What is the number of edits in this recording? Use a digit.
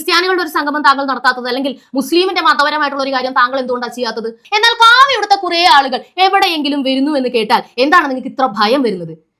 1